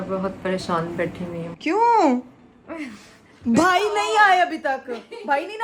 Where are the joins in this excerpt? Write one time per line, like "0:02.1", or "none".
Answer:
none